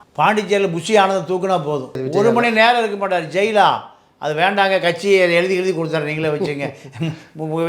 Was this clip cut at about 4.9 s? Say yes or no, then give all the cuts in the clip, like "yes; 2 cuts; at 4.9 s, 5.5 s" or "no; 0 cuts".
no; 1 cut; at 2.0 s